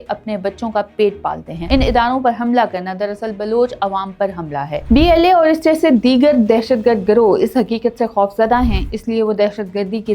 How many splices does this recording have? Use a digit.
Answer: 1